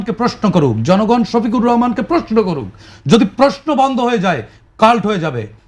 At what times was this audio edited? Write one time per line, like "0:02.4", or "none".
none